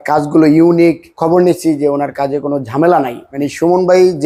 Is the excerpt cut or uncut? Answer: cut